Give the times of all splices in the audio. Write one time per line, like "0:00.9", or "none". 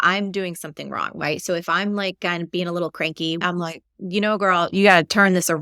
0:03.4